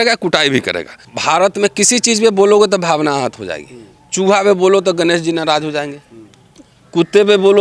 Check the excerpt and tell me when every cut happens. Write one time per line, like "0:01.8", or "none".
0:01.1